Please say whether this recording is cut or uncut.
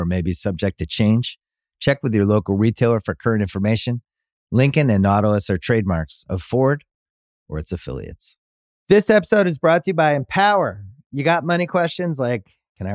cut